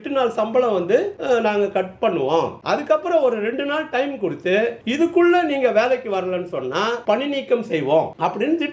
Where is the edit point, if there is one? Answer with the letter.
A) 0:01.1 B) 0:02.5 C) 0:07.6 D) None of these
D